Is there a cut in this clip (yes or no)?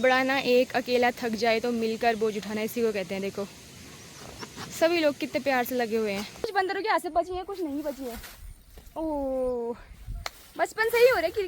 yes